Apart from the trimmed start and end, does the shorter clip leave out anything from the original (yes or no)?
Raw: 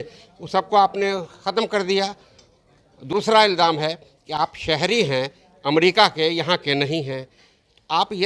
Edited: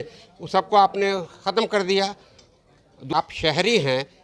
yes